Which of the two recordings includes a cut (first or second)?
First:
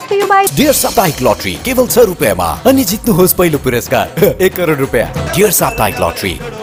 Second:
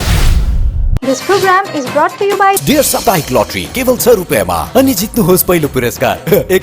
second